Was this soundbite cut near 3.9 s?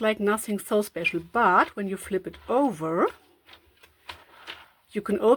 no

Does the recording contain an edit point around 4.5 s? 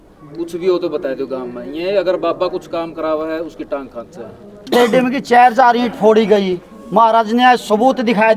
yes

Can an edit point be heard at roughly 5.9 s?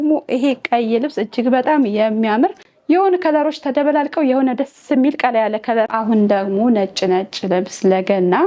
yes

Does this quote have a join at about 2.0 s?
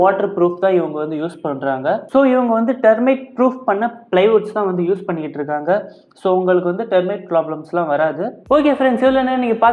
no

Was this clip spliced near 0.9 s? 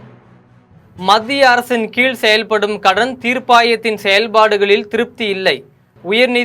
yes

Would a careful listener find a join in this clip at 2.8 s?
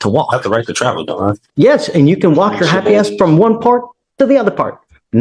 no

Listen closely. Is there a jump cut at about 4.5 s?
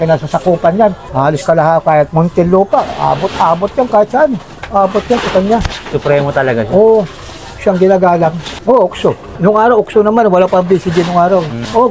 no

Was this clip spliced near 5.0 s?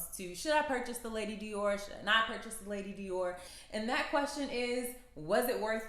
no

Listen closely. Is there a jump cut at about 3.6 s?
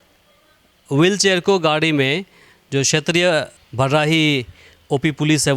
yes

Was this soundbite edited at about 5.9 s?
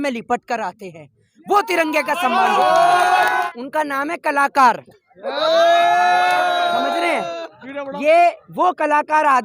no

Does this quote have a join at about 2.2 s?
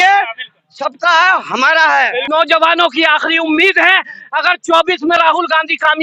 yes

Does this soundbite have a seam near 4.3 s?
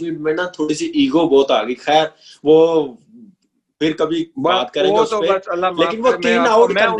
no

